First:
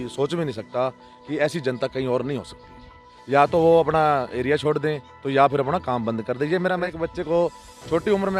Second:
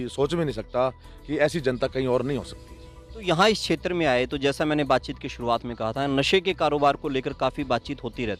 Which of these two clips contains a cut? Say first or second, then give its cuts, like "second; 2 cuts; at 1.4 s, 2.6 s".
first; 2 cuts; at 3.1 s, 6.9 s